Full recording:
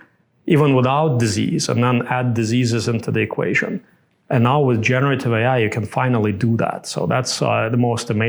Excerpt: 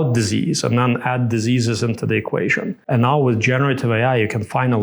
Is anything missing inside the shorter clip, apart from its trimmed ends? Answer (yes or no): yes